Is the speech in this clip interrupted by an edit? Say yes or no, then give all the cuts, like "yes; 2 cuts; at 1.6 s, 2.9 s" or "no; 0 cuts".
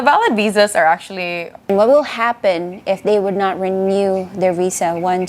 yes; 1 cut; at 1.6 s